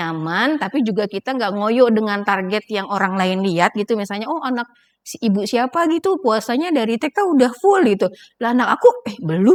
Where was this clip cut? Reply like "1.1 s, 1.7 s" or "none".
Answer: none

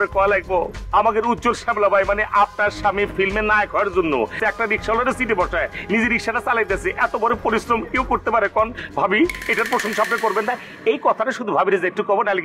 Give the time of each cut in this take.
4.4 s

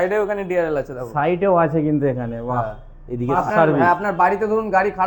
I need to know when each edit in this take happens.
3.4 s

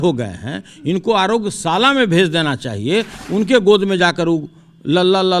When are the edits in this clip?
none

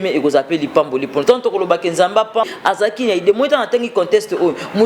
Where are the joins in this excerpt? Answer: 2.5 s

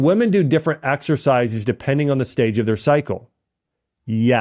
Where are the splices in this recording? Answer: none

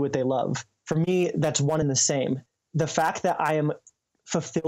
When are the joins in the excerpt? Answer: 2.2 s

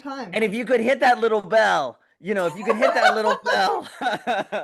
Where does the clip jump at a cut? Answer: none

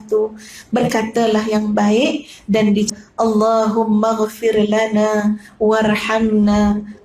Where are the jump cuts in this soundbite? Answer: 2.9 s

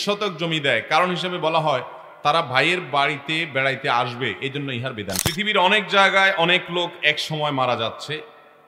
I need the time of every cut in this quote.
5.2 s

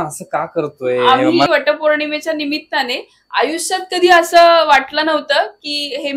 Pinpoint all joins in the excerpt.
1.5 s

